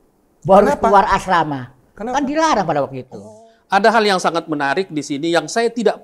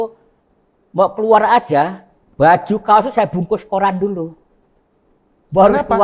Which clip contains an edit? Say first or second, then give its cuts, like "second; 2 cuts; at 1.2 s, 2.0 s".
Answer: first; 1 cut; at 3.2 s